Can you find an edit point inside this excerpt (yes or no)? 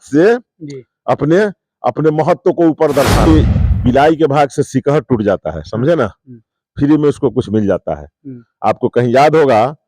yes